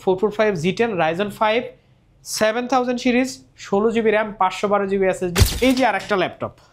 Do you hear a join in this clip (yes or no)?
yes